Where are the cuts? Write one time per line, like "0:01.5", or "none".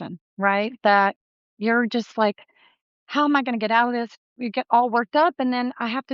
0:04.3